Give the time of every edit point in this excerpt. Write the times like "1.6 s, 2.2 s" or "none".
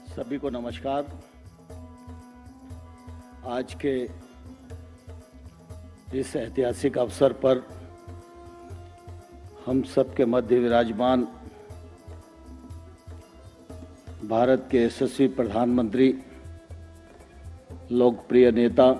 1.2 s, 3.1 s, 7.7 s, 9.6 s, 11.5 s, 13.7 s